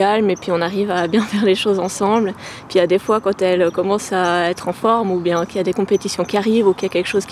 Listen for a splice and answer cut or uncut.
uncut